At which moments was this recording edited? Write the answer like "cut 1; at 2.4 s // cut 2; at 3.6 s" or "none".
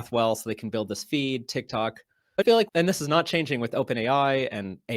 cut 1; at 2.7 s